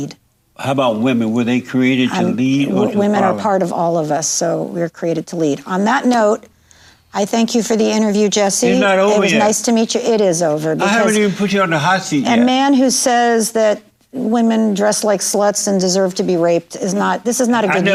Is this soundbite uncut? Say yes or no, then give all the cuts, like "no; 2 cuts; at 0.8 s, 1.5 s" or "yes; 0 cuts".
yes; 0 cuts